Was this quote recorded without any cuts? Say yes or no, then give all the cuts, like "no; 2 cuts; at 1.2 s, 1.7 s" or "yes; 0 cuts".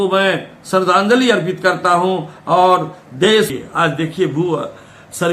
no; 1 cut; at 3.5 s